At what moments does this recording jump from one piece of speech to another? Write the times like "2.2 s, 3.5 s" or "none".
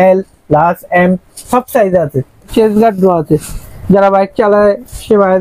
2.5 s

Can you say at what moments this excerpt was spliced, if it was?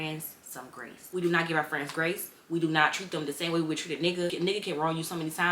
0.9 s, 4.3 s

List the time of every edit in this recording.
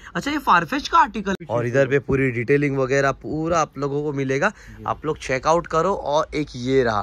1.4 s

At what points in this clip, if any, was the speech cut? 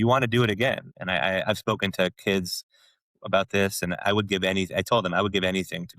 0.9 s

